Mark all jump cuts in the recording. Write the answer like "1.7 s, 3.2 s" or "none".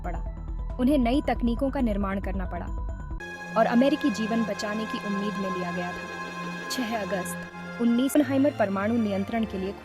3.2 s, 8.1 s